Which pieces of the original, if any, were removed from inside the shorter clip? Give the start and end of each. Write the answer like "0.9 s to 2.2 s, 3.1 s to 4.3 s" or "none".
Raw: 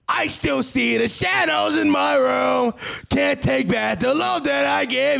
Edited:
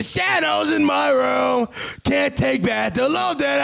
none

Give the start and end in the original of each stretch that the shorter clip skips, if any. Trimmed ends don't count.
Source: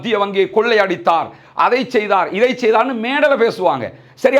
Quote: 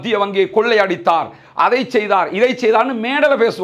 none

